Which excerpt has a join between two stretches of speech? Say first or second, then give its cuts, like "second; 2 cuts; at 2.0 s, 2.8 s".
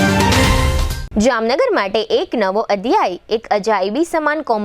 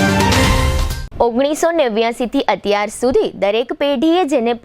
first; 1 cut; at 0.9 s